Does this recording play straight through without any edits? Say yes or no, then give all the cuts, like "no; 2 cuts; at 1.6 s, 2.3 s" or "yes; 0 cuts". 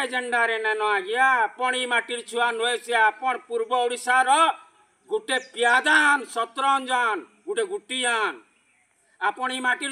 yes; 0 cuts